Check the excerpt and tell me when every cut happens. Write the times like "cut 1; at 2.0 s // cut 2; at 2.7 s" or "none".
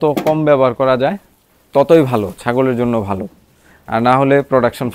none